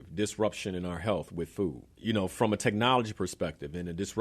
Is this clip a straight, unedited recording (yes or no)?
no